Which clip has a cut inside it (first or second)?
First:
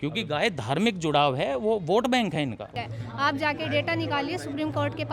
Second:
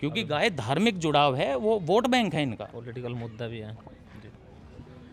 first